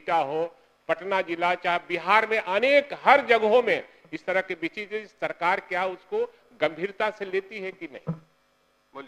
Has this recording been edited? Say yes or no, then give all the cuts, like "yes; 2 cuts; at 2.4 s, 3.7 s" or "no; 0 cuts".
no; 0 cuts